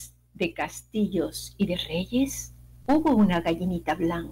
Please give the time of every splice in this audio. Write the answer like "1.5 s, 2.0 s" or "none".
none